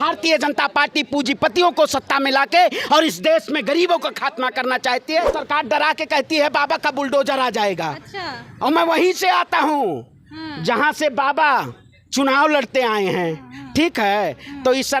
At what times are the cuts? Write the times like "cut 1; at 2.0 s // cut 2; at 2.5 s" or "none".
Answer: cut 1; at 5.4 s